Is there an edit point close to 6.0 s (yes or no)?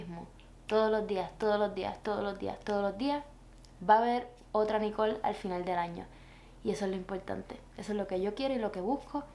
no